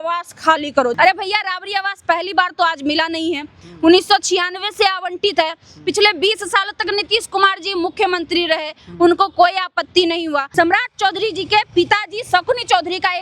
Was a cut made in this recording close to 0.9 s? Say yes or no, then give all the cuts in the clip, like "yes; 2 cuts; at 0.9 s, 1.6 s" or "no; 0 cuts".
yes; 2 cuts; at 0.9 s, 10.5 s